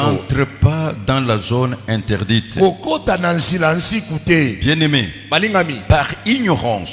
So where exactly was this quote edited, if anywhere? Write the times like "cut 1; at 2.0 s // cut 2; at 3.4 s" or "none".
none